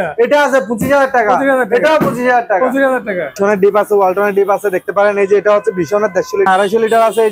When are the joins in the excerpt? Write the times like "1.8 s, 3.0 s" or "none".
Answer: 3.4 s, 6.5 s